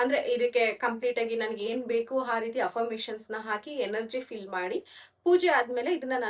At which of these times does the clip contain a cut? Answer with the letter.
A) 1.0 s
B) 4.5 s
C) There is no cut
C